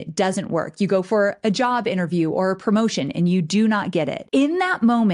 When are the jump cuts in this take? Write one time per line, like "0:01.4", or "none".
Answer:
0:04.2